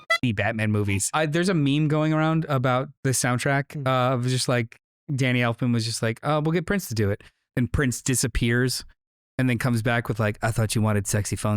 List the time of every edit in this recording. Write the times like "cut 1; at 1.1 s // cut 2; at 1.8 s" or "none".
cut 1; at 1.1 s

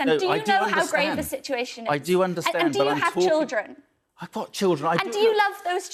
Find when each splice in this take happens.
none

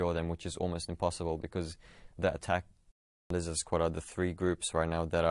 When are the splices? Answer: cut 1; at 3.2 s

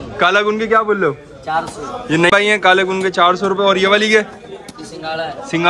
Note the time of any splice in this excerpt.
none

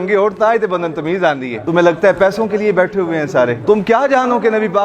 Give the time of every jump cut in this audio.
cut 1; at 1.5 s // cut 2; at 3.6 s

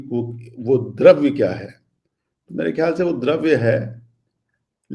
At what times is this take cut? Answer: none

